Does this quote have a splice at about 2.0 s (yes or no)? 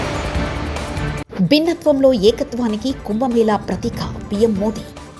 no